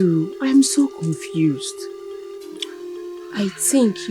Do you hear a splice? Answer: no; 0 cuts

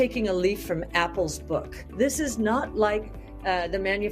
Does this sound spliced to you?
yes; 1 cut; at 1.8 s

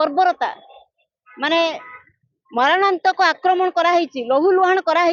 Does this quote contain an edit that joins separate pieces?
no; 0 cuts

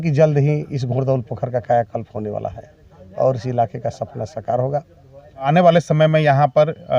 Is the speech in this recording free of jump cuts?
no; 1 cut; at 5.5 s

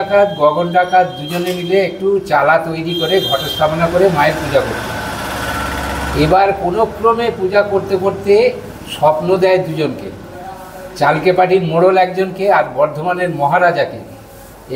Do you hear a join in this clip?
no; 0 cuts

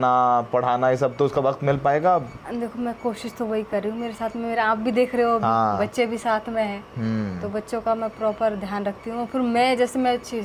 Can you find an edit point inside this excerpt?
no; 0 cuts

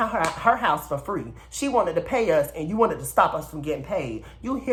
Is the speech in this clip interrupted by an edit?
no; 0 cuts

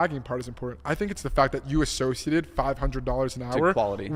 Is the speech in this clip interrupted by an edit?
no; 0 cuts

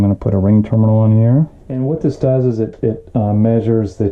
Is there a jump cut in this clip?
yes; 1 cut; at 1.8 s

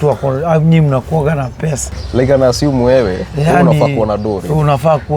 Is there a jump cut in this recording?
yes; 1 cut; at 2.0 s

